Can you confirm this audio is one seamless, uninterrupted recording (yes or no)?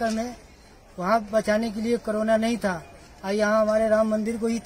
yes